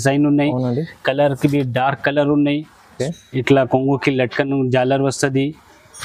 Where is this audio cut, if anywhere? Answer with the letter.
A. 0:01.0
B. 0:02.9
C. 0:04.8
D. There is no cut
B